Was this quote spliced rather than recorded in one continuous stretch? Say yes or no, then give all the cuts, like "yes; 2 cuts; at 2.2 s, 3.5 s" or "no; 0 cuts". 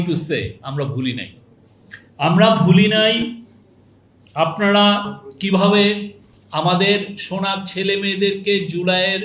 no; 0 cuts